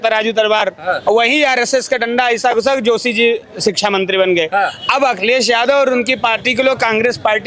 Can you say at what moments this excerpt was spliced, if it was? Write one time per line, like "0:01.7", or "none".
none

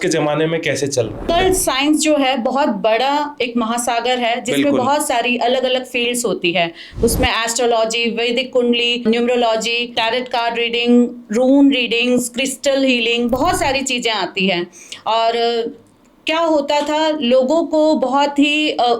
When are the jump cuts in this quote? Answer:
0:01.2
0:09.0
0:09.9

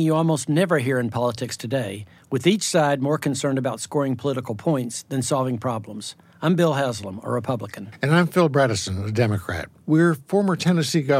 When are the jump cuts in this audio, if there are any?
none

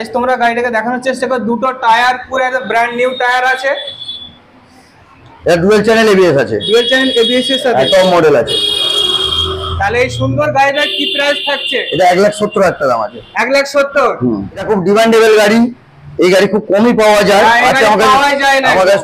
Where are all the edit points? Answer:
0:14.6

